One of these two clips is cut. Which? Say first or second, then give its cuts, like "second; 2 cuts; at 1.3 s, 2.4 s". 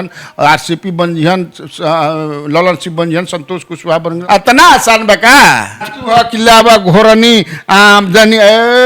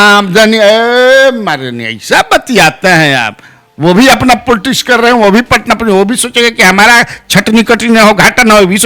first; 2 cuts; at 4.2 s, 5.9 s